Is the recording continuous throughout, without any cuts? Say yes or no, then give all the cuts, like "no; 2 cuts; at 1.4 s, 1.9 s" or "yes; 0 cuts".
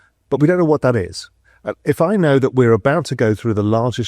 yes; 0 cuts